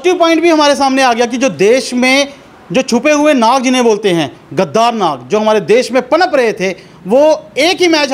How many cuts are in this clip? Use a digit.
0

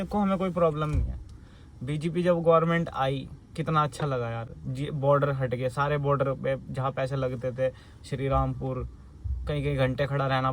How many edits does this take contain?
0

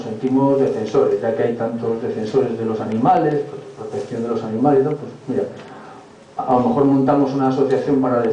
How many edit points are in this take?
1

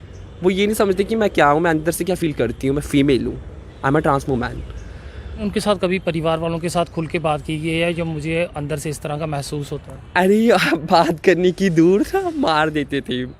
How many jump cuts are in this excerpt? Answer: 1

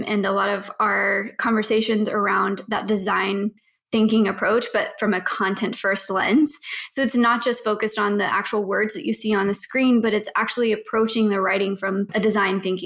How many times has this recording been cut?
0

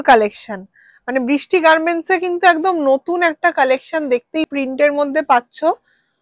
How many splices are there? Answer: 1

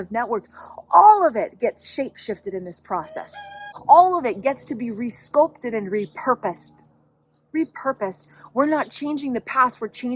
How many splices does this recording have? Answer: 1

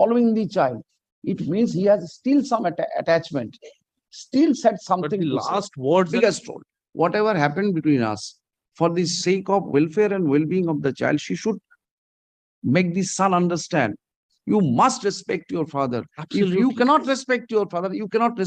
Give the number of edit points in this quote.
1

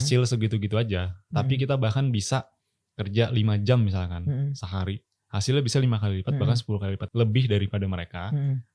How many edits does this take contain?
1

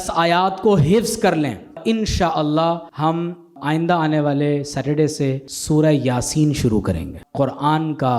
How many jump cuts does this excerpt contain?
4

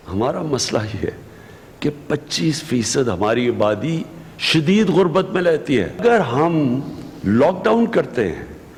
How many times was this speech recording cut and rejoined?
0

